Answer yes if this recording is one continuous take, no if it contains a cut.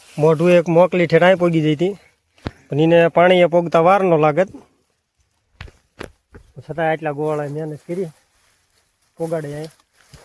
yes